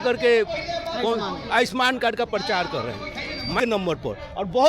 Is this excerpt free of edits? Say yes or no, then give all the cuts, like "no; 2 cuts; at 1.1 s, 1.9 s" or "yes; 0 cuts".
no; 1 cut; at 3.6 s